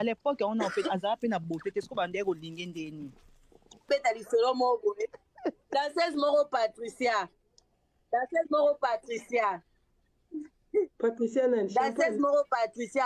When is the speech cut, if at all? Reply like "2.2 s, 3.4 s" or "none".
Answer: 3.8 s